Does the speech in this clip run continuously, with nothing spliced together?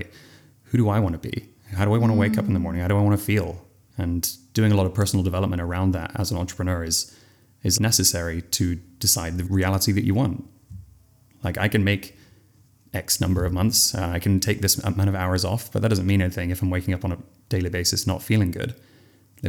yes; 0 cuts

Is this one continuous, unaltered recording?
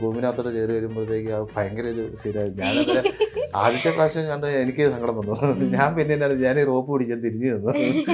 yes; 0 cuts

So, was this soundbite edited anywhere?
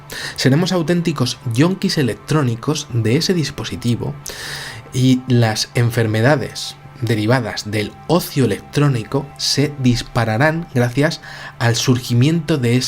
yes; 1 cut; at 5.5 s

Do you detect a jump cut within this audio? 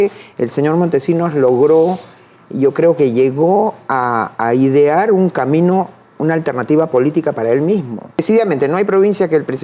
yes; 1 cut; at 8.2 s

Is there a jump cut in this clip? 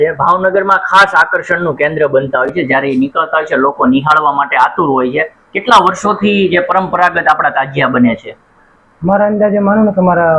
no; 0 cuts

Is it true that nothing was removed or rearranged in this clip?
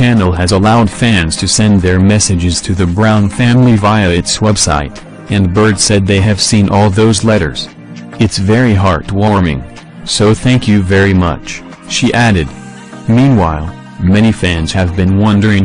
no; 1 cut; at 4.1 s

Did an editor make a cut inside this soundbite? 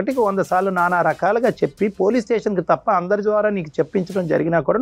no; 0 cuts

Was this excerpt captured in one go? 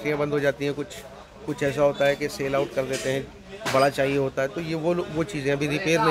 yes; 0 cuts

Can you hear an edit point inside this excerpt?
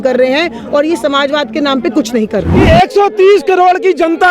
yes; 1 cut; at 2.5 s

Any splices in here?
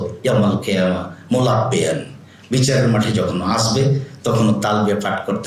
no; 0 cuts

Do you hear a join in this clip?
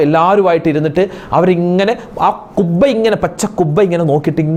no; 0 cuts

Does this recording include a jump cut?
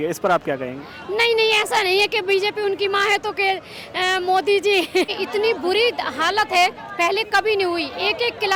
yes; 1 cut; at 5.1 s

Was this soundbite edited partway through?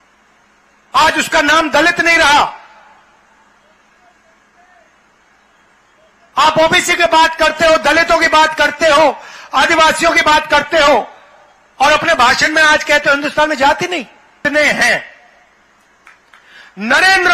yes; 1 cut; at 14.4 s

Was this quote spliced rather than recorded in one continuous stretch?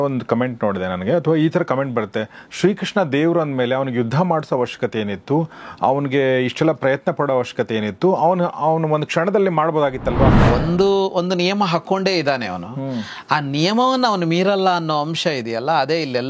yes; 1 cut; at 10.4 s

